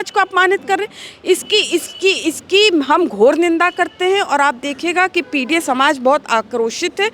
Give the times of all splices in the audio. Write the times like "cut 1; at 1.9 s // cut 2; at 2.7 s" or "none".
none